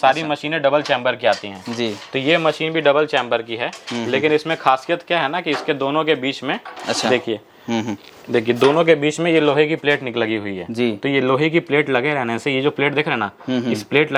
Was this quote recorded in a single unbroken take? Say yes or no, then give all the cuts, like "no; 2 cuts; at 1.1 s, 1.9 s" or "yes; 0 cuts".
yes; 0 cuts